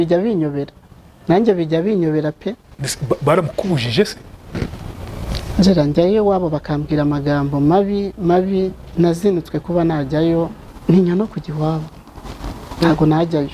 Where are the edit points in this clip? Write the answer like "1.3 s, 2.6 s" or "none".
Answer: 10.6 s